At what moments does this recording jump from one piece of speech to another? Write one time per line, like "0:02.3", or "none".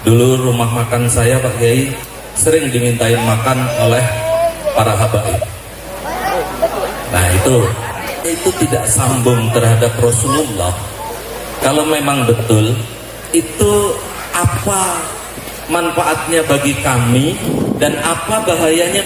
0:08.2